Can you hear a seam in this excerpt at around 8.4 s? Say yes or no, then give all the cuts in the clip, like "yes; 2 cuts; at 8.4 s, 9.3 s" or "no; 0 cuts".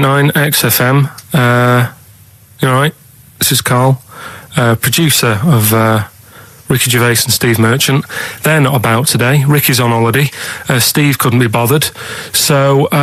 no; 0 cuts